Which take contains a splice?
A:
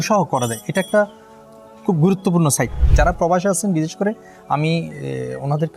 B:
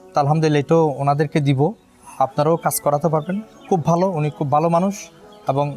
A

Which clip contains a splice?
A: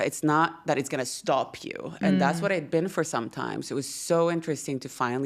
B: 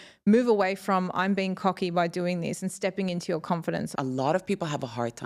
B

